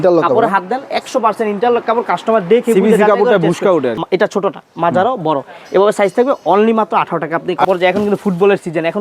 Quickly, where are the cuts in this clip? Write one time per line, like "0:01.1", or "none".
0:04.0
0:07.7